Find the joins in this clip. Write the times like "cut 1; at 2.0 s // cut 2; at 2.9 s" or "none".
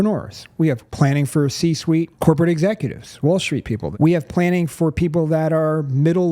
cut 1; at 0.9 s // cut 2; at 2.1 s // cut 3; at 3.9 s